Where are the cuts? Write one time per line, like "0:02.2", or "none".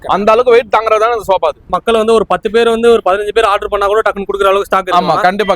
0:01.7